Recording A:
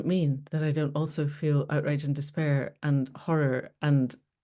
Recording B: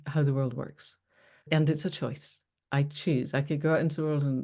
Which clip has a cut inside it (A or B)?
B